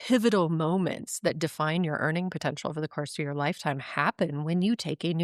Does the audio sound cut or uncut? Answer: uncut